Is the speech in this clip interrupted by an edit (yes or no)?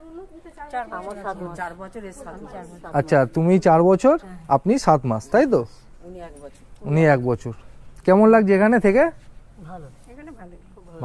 no